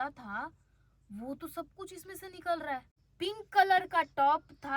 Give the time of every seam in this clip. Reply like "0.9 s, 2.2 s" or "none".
3.0 s